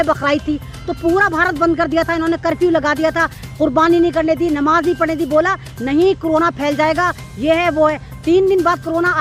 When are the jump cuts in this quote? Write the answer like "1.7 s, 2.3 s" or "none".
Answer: none